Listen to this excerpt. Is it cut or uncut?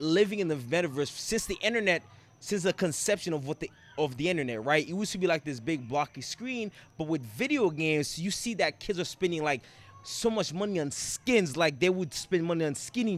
uncut